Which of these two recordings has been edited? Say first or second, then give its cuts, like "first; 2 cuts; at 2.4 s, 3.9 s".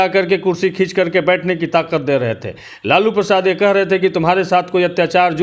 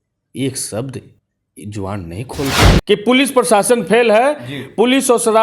second; 1 cut; at 2.7 s